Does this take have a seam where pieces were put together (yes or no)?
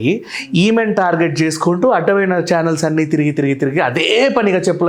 no